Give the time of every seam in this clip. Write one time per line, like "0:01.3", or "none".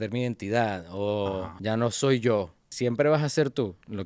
0:01.5
0:02.6